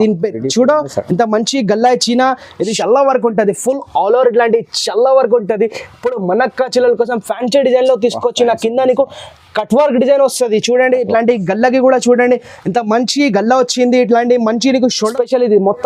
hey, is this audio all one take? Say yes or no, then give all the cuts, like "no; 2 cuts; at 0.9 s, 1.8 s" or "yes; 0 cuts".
no; 2 cuts; at 2.7 s, 15.0 s